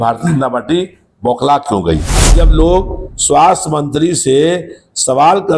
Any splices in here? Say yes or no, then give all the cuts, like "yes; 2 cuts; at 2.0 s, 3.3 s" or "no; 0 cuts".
yes; 1 cut; at 2.4 s